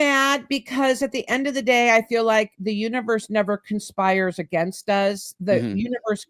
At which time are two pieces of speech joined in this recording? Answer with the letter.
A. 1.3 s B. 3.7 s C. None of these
C